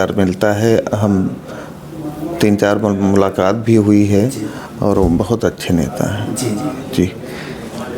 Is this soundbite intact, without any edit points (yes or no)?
yes